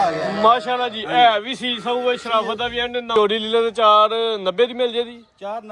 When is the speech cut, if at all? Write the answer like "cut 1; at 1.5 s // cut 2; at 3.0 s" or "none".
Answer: cut 1; at 3.1 s